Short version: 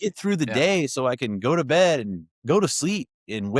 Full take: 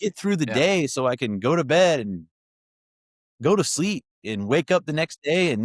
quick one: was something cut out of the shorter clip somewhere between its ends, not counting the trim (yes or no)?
yes